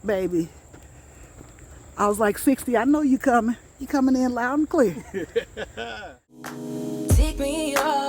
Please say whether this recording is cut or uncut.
cut